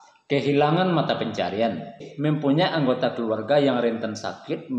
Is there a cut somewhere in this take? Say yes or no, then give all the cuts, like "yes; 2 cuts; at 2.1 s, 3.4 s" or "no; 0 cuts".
yes; 1 cut; at 2.0 s